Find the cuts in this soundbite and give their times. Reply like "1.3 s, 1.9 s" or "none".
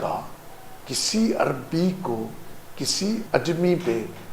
3.2 s